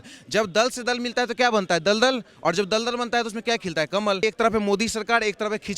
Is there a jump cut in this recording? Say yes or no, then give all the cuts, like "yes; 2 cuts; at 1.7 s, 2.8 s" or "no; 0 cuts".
yes; 1 cut; at 4.2 s